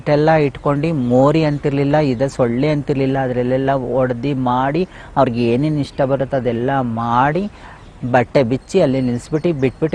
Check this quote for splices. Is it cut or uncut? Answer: uncut